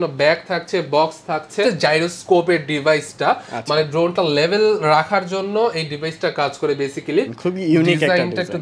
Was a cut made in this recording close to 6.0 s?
no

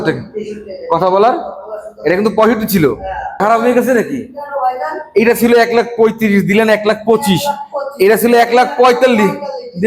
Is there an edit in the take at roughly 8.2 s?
no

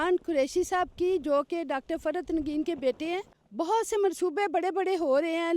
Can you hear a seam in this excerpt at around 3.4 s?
yes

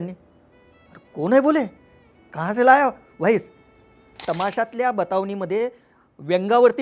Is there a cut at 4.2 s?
yes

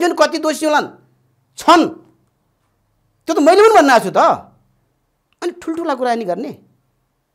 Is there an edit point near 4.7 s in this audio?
no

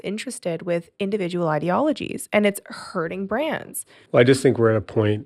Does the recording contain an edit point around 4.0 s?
no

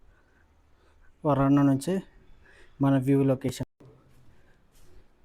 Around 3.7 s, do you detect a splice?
yes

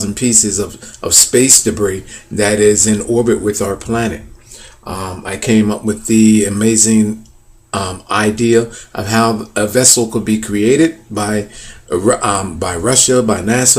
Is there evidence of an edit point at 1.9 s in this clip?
yes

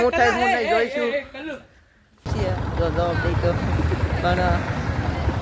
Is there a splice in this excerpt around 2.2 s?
yes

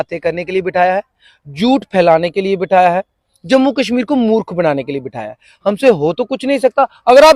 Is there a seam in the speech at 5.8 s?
no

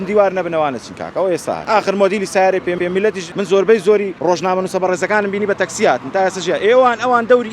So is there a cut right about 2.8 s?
yes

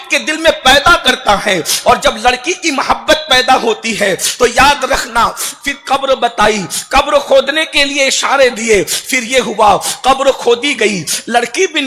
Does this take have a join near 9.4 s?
no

